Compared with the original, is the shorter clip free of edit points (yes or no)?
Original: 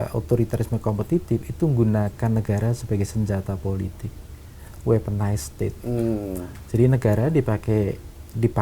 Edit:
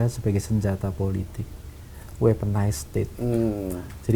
yes